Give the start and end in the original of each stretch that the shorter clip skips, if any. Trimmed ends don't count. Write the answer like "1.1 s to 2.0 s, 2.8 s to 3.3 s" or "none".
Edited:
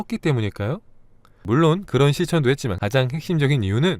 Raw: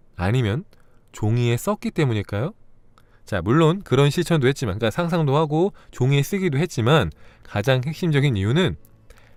3.2 s to 3.4 s, 4.7 s to 7.4 s